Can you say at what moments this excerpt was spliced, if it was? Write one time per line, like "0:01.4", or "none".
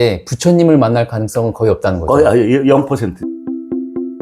0:03.2